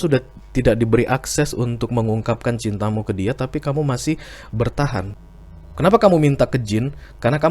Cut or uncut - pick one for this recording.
cut